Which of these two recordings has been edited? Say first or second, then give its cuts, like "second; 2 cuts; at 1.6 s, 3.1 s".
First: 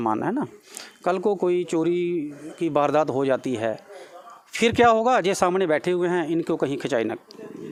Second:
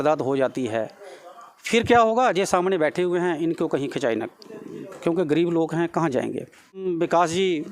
second; 1 cut; at 6.8 s